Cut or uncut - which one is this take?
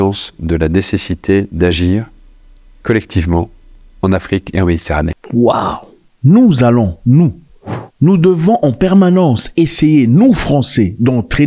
uncut